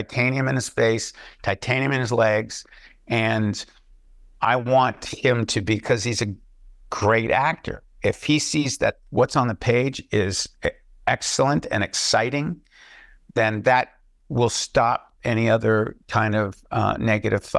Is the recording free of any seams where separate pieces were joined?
yes; 0 cuts

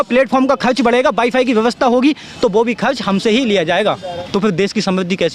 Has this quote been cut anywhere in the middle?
yes; 1 cut; at 4.1 s

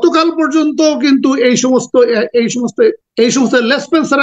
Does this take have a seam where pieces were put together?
yes; 1 cut; at 3.0 s

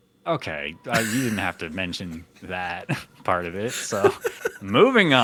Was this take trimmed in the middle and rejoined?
no; 0 cuts

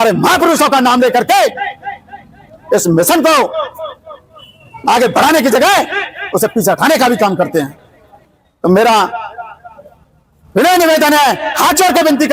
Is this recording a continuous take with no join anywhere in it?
yes; 0 cuts

